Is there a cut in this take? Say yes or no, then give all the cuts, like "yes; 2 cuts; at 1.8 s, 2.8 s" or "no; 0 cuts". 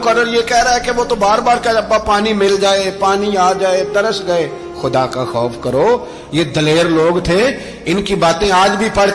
no; 0 cuts